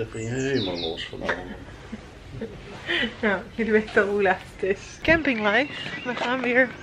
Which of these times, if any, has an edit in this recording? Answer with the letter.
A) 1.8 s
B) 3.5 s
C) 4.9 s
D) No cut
C